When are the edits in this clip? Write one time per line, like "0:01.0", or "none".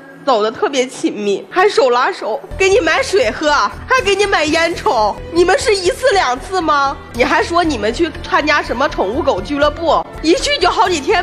0:01.5
0:02.4
0:03.8
0:05.2
0:07.0
0:10.1